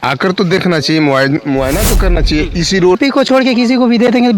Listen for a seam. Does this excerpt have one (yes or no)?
yes